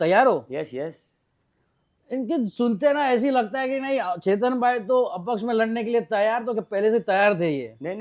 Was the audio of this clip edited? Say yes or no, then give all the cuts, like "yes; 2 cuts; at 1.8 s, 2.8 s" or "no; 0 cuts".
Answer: no; 0 cuts